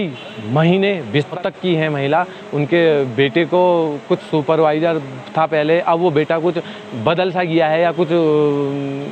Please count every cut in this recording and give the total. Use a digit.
1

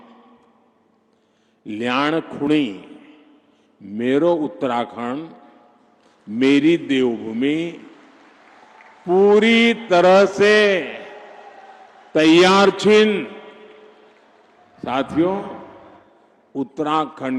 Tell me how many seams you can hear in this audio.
0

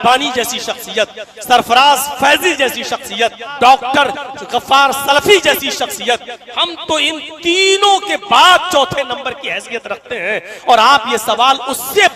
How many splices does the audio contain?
1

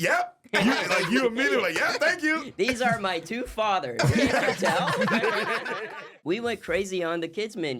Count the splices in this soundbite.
1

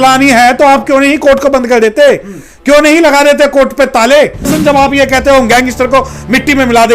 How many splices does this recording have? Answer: 1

